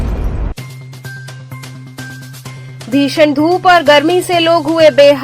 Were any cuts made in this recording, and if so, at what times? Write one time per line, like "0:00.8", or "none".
0:02.4